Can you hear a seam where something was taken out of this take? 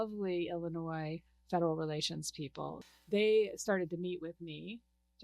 yes; 1 cut; at 2.8 s

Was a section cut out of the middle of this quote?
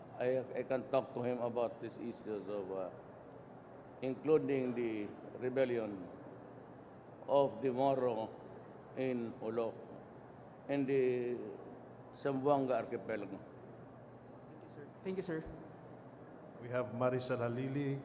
no; 0 cuts

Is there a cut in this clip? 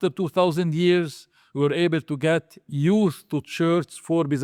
no; 0 cuts

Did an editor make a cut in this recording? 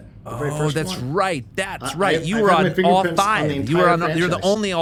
no; 0 cuts

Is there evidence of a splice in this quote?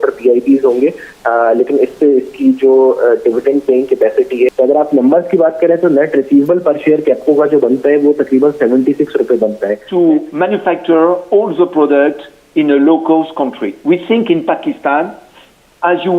yes; 2 cuts; at 4.5 s, 9.8 s

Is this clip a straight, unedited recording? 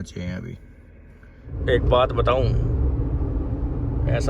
no; 1 cut; at 1.5 s

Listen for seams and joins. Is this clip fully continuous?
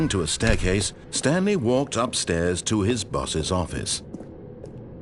yes; 0 cuts

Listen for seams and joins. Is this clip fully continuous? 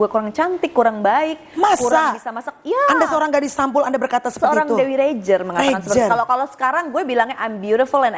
yes; 0 cuts

